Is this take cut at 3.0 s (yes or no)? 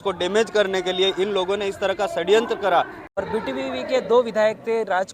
yes